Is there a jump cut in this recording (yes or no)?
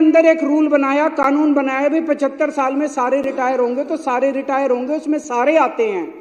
no